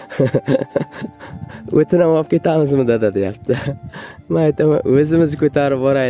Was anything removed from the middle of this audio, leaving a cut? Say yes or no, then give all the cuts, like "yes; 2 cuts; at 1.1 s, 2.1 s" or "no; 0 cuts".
no; 0 cuts